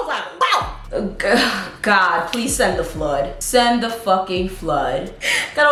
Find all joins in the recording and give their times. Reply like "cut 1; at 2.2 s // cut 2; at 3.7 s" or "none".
none